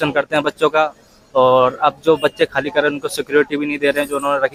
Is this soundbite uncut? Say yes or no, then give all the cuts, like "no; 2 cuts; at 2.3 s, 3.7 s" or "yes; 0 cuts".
yes; 0 cuts